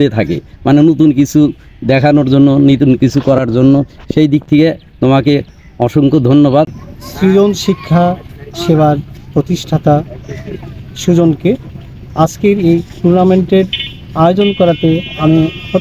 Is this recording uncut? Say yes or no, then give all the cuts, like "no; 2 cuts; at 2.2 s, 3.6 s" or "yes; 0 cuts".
no; 1 cut; at 6.7 s